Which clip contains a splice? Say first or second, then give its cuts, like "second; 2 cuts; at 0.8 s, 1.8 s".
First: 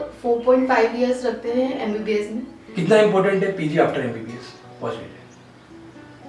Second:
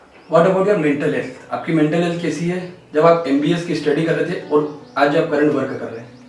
first; 1 cut; at 2.6 s